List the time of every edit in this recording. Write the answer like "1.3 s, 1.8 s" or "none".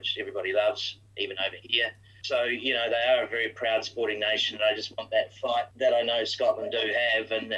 0.9 s, 2.2 s, 5.7 s